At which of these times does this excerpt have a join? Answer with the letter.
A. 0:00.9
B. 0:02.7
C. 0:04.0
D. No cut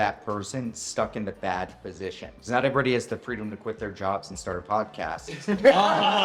D